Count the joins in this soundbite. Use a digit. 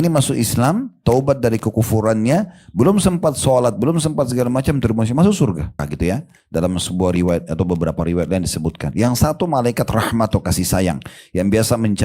1